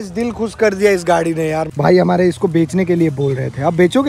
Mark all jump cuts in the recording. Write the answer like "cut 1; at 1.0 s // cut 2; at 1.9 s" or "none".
cut 1; at 1.7 s